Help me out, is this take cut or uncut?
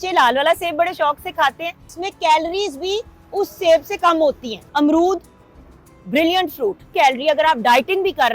cut